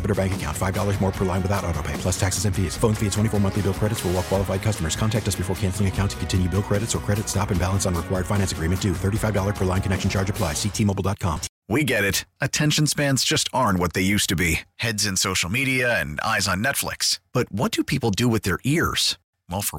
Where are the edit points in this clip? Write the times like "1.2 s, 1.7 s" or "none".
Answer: 11.5 s